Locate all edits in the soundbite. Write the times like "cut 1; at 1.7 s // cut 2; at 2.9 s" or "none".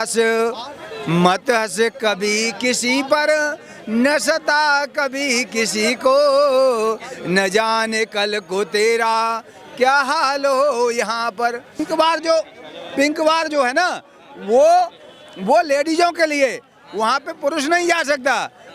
cut 1; at 11.9 s